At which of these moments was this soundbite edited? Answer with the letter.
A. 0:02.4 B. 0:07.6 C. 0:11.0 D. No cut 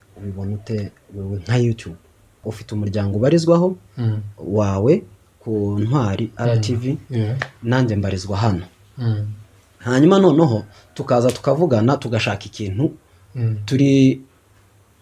A